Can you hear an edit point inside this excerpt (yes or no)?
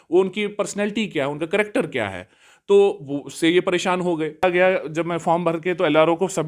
yes